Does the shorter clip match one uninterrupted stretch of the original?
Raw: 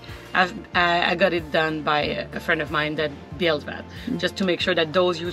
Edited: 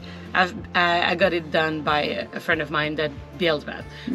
yes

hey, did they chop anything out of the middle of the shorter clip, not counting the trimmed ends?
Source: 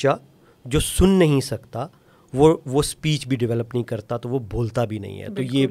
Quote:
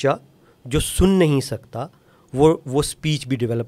no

